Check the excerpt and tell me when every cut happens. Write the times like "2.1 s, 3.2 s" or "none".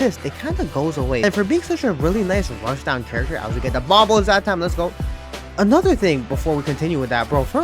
1.2 s